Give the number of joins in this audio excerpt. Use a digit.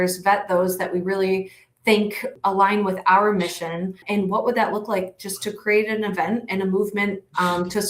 2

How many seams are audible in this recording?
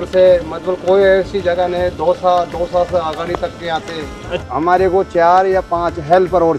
1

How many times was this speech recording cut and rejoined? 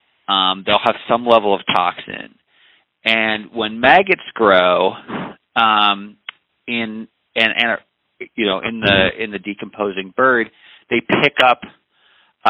0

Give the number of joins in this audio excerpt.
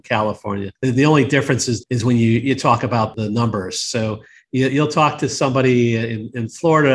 2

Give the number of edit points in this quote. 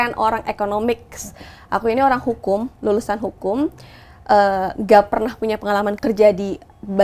1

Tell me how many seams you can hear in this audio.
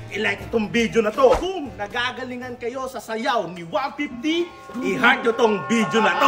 1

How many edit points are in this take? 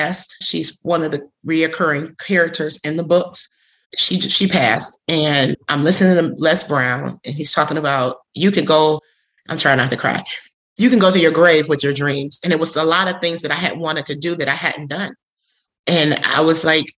1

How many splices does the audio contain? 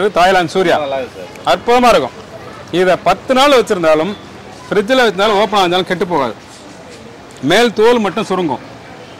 0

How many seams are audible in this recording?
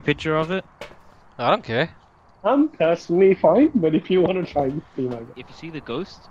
1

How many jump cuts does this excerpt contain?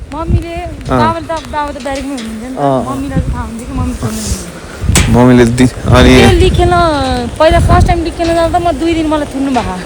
0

